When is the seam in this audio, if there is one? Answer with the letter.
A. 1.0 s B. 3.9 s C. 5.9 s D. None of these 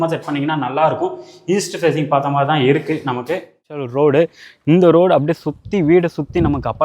B